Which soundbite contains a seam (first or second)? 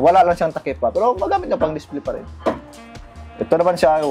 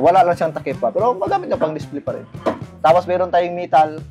second